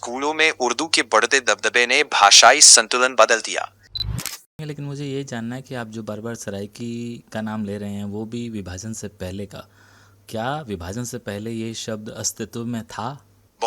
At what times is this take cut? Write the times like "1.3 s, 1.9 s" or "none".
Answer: 4.3 s